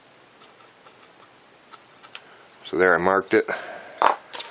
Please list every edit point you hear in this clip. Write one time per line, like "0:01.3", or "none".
0:03.3